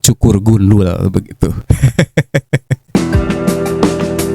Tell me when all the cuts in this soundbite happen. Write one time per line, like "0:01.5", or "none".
0:02.8

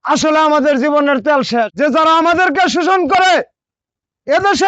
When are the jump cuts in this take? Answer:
0:01.7

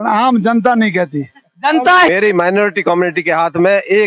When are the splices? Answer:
0:02.1

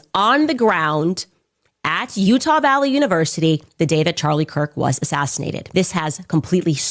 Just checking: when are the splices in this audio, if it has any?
0:05.6

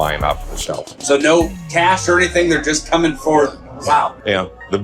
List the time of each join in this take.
0:00.9

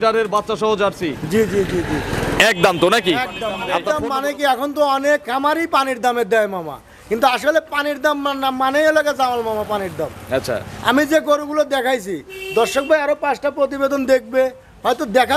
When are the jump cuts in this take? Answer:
0:03.7

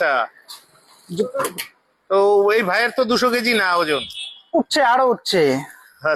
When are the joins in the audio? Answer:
none

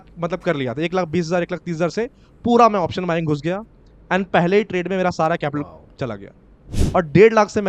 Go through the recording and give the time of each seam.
0:06.7

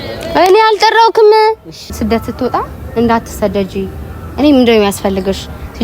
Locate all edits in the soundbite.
0:01.9

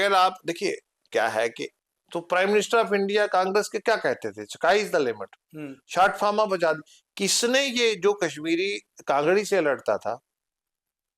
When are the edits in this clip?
0:01.7

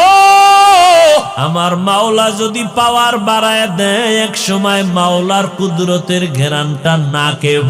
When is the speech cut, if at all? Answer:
0:01.4

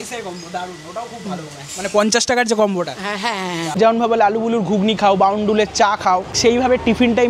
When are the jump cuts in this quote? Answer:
0:03.6
0:06.3

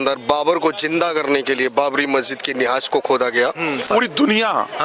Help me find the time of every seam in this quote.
0:03.9

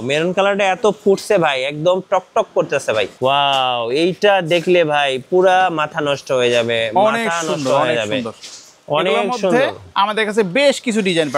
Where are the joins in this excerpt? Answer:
0:03.1

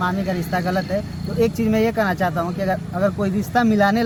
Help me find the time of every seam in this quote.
none

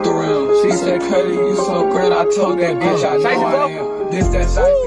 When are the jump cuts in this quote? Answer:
none

